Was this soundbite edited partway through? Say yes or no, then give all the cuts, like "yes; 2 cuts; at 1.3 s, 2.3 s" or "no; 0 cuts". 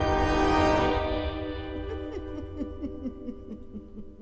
no; 0 cuts